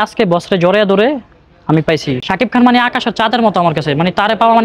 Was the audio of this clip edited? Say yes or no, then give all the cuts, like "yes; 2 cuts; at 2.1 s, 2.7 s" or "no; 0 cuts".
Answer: yes; 1 cut; at 2.2 s